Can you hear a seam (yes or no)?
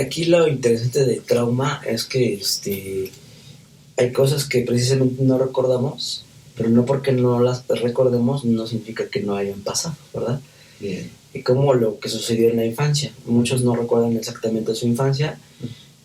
no